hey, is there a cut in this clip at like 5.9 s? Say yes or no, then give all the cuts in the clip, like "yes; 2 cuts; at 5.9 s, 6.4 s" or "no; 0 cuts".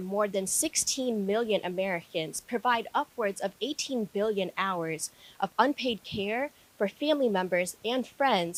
no; 0 cuts